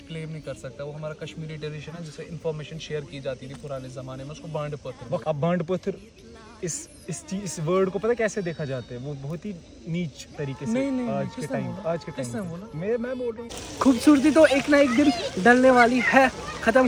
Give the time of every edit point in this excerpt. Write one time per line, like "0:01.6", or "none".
0:05.2
0:13.6